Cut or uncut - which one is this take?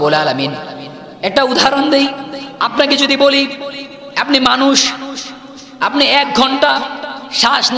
uncut